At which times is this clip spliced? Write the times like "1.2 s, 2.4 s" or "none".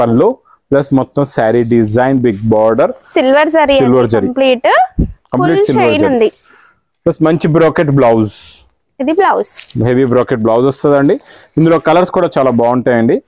none